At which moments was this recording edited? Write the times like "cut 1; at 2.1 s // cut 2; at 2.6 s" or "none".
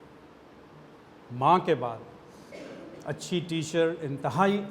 cut 1; at 1.0 s